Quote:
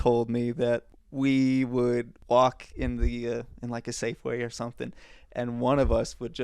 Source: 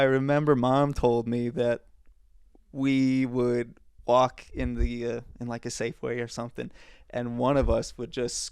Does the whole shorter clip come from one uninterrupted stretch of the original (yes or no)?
no